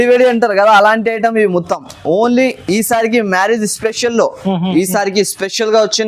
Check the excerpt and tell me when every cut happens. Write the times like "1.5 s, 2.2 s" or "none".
4.7 s